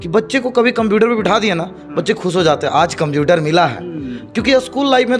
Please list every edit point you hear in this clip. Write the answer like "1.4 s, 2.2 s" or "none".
none